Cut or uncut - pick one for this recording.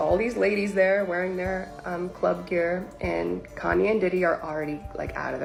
uncut